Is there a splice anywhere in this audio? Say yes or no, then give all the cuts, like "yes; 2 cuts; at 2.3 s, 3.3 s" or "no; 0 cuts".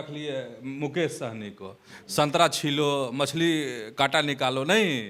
no; 0 cuts